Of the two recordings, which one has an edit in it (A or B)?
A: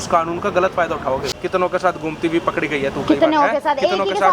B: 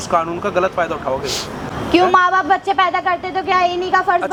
A